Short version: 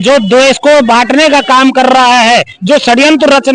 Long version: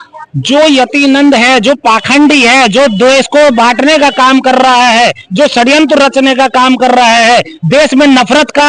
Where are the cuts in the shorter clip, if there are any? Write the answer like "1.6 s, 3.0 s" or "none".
none